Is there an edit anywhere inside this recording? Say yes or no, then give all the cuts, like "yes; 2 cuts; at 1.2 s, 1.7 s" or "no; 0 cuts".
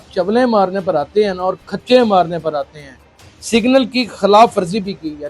yes; 1 cut; at 3.2 s